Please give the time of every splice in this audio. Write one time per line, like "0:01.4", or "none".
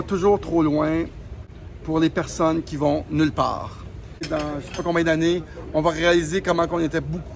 0:01.4
0:04.3